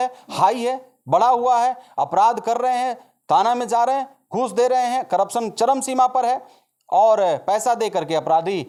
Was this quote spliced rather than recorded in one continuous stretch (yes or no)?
no